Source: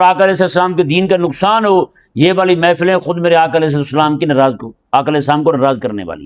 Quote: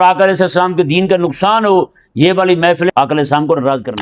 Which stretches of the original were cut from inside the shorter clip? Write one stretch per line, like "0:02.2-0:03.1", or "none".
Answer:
0:02.9-0:04.9